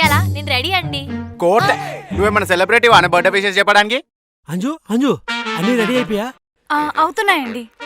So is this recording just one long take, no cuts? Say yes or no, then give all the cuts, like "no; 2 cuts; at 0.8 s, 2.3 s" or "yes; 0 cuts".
no; 1 cut; at 4.1 s